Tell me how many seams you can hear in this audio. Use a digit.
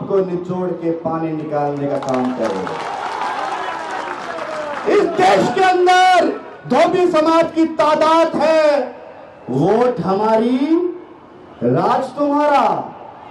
0